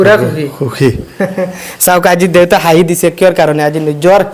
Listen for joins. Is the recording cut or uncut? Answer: uncut